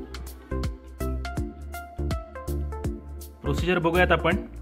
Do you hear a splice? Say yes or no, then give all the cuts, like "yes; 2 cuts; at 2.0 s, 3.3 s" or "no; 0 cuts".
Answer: no; 0 cuts